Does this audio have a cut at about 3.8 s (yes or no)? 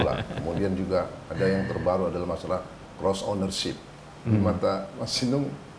no